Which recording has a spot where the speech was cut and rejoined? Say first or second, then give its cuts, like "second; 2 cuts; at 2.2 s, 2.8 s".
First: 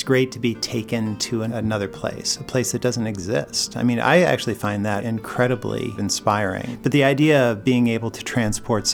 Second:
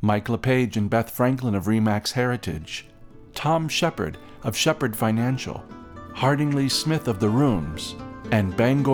first; 3 cuts; at 1.5 s, 5.0 s, 6.4 s